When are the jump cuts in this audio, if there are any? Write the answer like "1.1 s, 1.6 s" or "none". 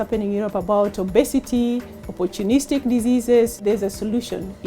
3.6 s